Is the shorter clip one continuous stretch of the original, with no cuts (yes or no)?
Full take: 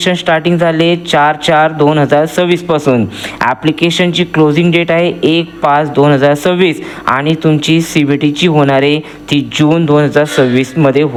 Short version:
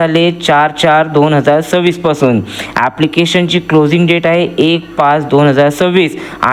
yes